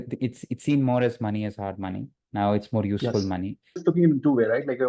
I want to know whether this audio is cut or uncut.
cut